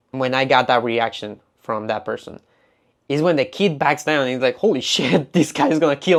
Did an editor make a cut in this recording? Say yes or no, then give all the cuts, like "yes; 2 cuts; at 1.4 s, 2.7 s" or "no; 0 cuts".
no; 0 cuts